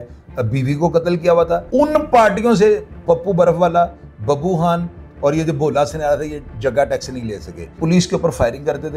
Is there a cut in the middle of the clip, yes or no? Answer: yes